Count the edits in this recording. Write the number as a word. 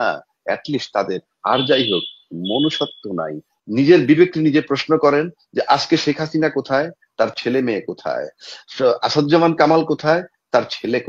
one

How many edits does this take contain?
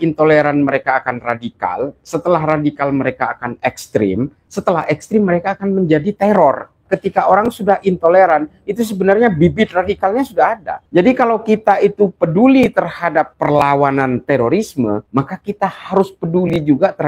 four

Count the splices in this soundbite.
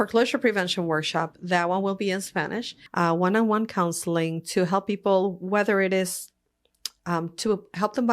one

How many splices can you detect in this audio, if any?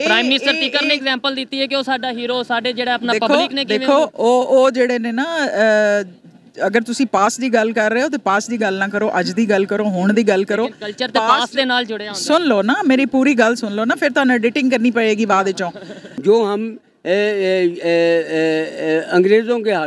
one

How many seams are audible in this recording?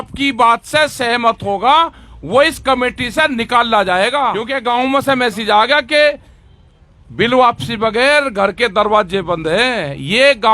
one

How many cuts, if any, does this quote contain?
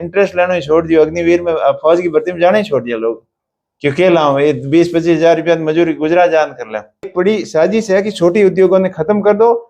one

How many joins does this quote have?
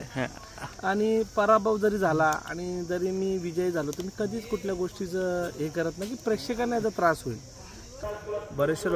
one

